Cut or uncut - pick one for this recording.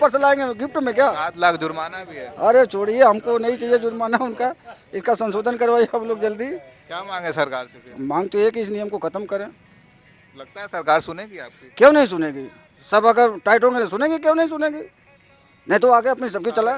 uncut